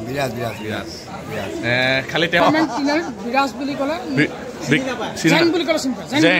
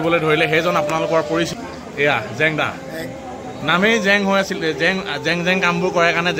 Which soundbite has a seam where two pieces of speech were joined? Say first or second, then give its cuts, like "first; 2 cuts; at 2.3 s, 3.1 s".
first; 1 cut; at 2.4 s